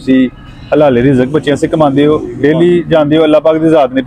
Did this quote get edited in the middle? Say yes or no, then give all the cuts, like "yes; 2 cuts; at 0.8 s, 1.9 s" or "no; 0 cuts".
no; 0 cuts